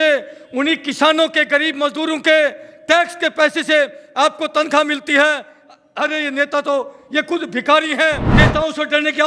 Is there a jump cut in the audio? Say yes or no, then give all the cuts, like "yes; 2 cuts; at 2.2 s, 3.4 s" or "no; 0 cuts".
yes; 1 cut; at 8.3 s